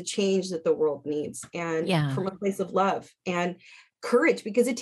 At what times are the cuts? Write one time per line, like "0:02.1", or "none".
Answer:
none